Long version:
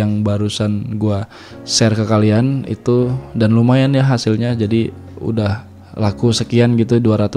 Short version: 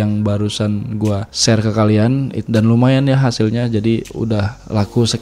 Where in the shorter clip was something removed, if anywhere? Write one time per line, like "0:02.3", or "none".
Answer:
0:01.3
0:02.4
0:04.3

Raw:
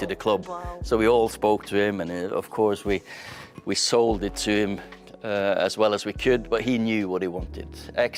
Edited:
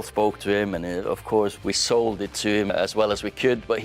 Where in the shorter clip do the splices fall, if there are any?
0:01.5
0:02.7

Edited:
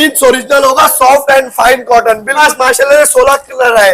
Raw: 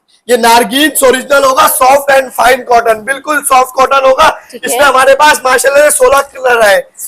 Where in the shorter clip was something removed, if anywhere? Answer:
0:02.4

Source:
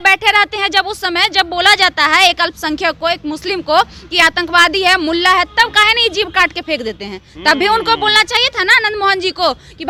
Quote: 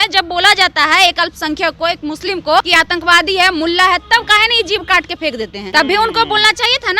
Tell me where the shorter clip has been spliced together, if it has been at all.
0:02.7
0:05.6

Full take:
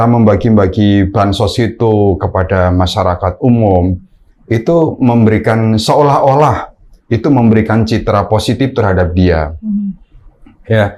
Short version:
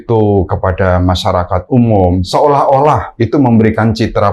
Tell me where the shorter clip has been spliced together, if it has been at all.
0:02.3
0:03.1

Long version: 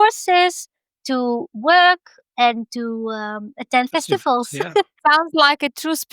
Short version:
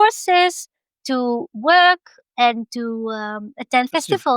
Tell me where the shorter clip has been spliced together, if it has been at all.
none

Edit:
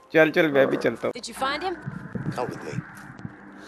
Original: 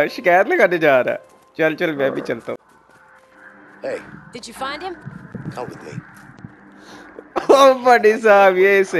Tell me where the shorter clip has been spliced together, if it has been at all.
0:01.3

